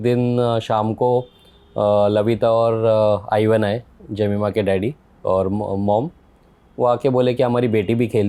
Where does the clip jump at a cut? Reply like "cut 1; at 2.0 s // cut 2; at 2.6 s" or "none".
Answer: none